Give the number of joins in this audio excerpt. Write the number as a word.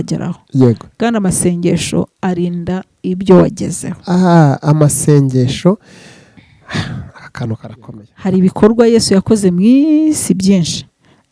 one